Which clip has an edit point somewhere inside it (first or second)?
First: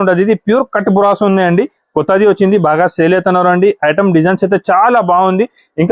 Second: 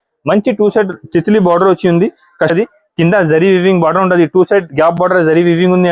second